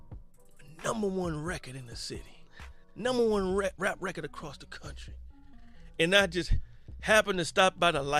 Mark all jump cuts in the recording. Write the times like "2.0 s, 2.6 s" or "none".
6.9 s